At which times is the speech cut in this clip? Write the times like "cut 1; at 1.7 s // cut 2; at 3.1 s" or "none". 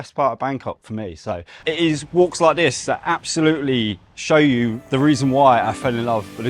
cut 1; at 1.5 s